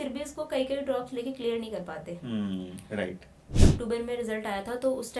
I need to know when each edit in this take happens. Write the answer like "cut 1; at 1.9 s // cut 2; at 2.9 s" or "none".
cut 1; at 3.6 s